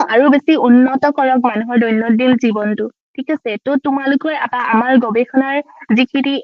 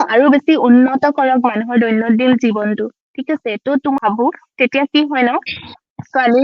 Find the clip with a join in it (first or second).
second